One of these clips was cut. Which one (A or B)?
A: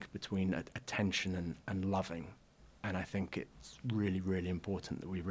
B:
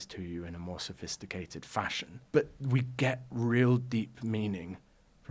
B